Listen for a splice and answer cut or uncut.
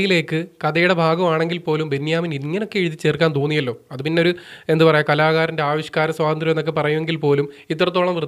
uncut